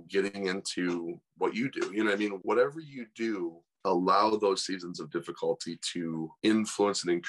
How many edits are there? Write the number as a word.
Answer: one